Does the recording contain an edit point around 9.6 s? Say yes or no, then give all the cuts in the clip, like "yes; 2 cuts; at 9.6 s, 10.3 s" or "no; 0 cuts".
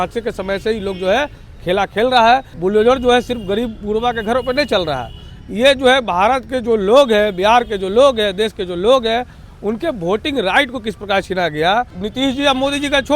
no; 2 cuts; at 2.5 s, 12.0 s